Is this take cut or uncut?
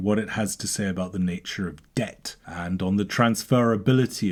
uncut